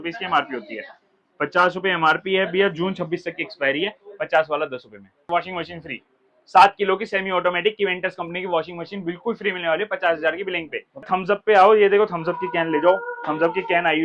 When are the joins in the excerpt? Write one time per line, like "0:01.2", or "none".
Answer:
0:05.2
0:11.1